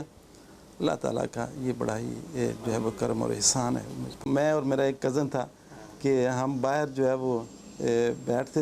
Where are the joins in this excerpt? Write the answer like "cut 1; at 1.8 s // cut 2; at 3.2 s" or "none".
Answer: cut 1; at 4.3 s